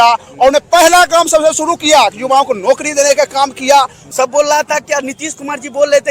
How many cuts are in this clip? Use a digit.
1